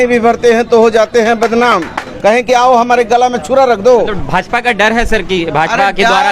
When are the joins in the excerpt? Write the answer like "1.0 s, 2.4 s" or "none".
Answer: 2.1 s